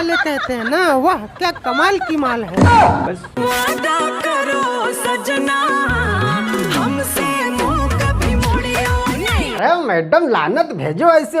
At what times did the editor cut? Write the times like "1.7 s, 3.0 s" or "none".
3.4 s